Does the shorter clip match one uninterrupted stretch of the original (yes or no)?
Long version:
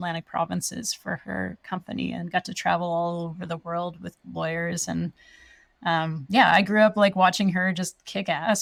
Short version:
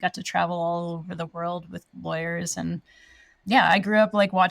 no